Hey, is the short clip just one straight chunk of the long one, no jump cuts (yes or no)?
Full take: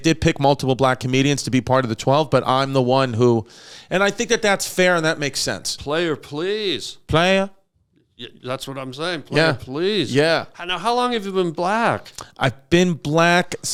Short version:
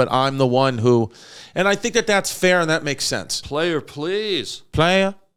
yes